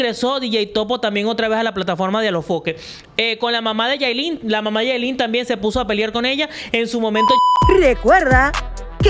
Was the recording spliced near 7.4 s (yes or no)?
yes